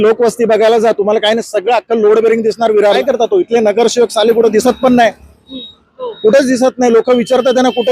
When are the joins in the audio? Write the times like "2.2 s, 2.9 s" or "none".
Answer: 3.0 s